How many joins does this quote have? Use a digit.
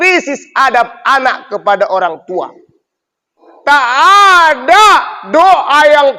1